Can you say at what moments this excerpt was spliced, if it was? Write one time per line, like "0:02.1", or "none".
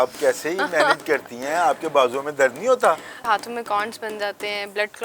0:03.2

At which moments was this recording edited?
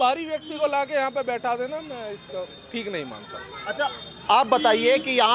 none

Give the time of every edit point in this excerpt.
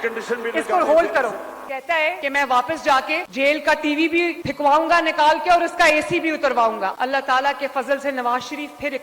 0:01.6
0:03.2
0:06.9

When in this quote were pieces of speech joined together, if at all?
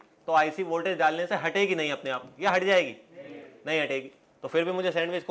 none

